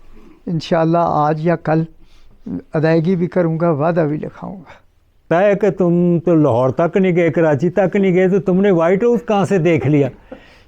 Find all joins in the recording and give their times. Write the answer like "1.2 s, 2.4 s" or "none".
5.3 s